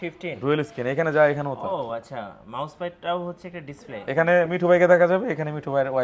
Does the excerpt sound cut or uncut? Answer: uncut